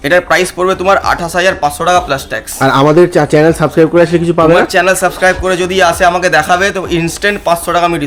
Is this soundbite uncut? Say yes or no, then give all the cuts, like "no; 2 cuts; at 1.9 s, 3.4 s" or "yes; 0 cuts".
yes; 0 cuts